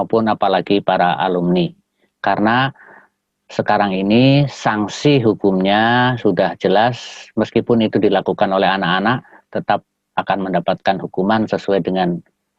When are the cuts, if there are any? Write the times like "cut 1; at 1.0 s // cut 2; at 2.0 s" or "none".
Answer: none

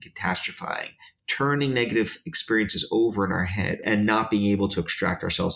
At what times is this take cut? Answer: cut 1; at 3.8 s

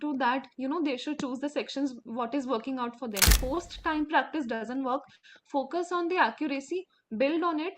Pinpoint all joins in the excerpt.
cut 1; at 3.4 s

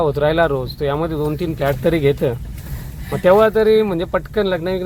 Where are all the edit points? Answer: none

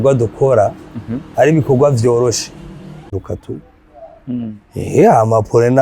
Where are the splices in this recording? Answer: cut 1; at 3.1 s

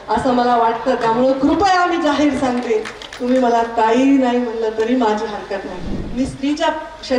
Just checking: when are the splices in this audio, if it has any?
cut 1; at 6.0 s

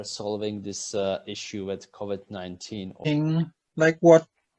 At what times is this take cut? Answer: cut 1; at 3.1 s

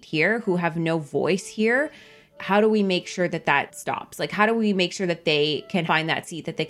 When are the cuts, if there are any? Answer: cut 1; at 2.3 s // cut 2; at 3.8 s // cut 3; at 5.8 s

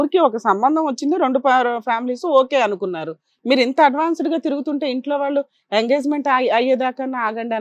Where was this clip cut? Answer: none

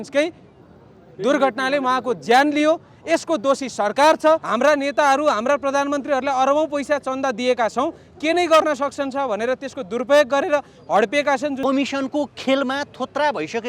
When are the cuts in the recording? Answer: cut 1; at 4.5 s // cut 2; at 11.6 s

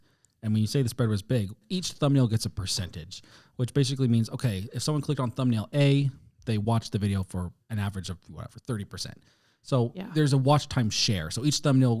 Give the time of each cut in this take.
cut 1; at 1.6 s

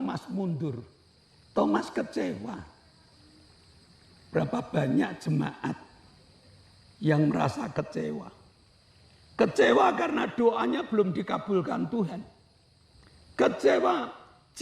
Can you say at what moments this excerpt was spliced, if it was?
none

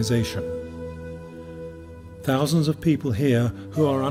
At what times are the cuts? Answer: none

